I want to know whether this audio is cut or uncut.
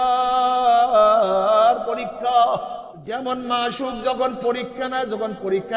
cut